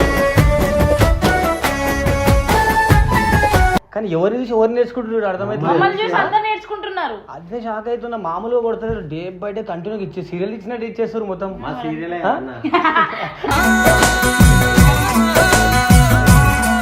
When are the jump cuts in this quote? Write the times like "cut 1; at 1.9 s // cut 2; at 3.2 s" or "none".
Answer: cut 1; at 3.9 s